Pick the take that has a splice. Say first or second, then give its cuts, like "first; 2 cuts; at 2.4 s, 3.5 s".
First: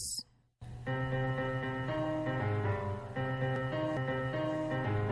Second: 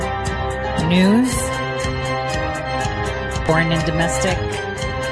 second; 1 cut; at 3.5 s